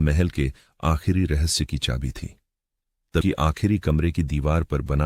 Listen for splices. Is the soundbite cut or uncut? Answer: cut